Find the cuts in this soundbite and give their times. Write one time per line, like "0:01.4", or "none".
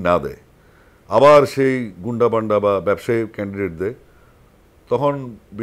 none